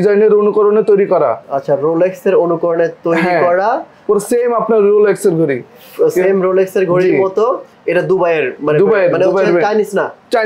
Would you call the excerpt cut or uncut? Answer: uncut